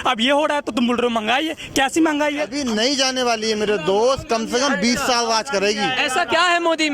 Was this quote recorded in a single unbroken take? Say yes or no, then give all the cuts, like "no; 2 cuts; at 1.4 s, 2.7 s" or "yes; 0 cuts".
no; 1 cut; at 2.5 s